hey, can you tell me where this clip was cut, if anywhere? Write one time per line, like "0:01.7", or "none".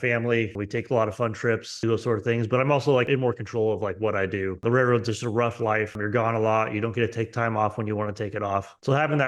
0:01.7